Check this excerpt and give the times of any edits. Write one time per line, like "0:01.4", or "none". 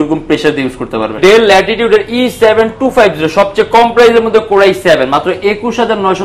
0:01.2